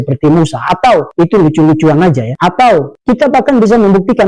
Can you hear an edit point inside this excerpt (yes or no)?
no